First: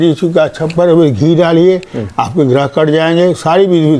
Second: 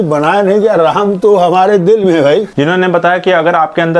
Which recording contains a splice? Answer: second; 1 cut; at 2.5 s

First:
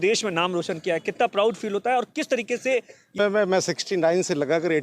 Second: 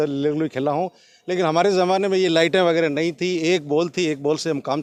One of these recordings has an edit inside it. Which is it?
first; 1 cut; at 3.2 s

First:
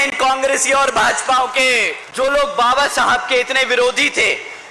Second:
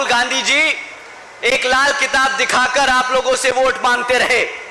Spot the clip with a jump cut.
first; 1 cut; at 2.0 s

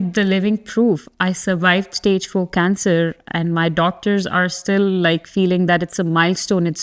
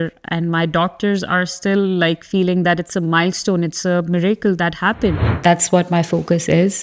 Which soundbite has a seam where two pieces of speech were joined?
second; 1 cut; at 5.3 s

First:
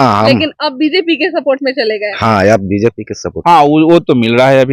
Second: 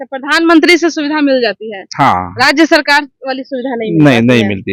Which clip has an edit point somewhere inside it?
first; 1 cut; at 3.3 s

